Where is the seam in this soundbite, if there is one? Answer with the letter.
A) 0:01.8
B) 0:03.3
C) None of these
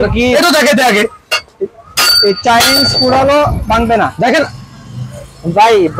C